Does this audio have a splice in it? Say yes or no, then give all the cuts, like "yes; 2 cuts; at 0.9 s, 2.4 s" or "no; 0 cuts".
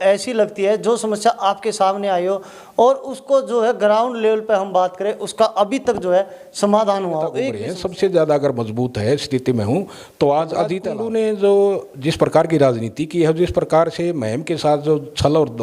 yes; 2 cuts; at 7.6 s, 10.8 s